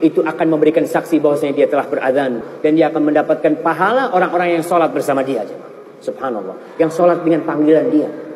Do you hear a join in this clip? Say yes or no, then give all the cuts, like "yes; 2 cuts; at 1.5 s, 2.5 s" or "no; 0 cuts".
no; 0 cuts